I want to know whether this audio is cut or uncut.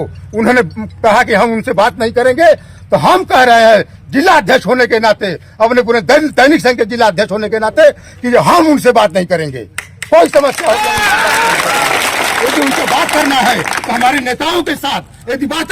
uncut